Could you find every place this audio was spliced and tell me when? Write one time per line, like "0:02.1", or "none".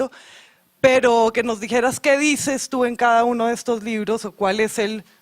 0:01.4